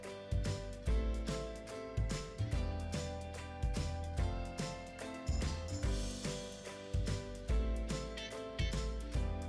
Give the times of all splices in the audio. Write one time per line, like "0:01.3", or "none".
none